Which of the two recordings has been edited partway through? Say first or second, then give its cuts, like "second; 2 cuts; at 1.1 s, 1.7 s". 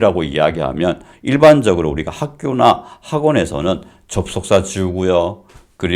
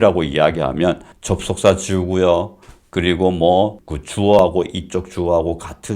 second; 2 cuts; at 1.1 s, 4.4 s